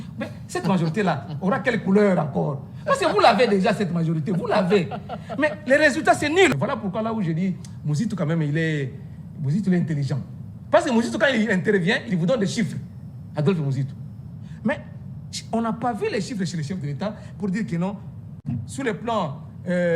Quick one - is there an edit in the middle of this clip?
yes; 1 cut; at 6.5 s

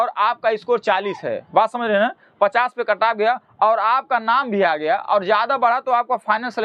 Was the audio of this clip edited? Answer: no; 0 cuts

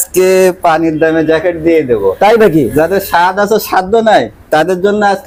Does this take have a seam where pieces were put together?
no; 0 cuts

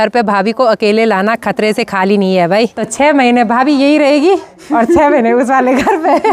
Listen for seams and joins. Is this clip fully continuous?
no; 1 cut; at 2.8 s

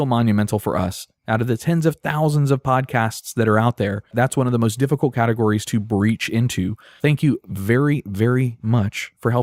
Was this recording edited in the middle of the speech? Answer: no; 0 cuts

